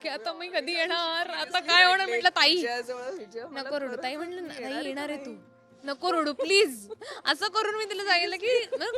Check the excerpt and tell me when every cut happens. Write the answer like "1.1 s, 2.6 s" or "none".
none